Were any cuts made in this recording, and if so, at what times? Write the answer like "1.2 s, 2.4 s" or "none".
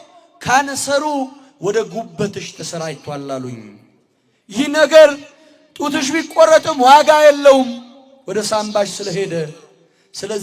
none